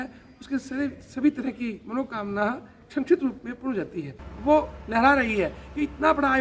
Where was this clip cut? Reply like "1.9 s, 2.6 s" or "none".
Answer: 4.2 s